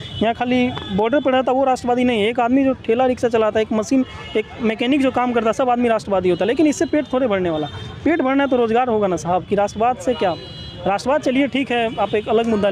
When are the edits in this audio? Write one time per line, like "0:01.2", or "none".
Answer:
none